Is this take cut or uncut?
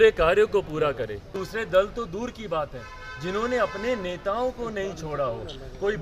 cut